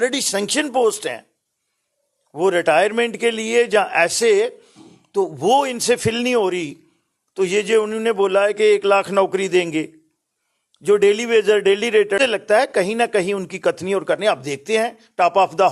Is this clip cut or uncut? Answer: cut